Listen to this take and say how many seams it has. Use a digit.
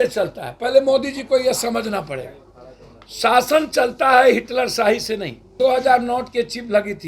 1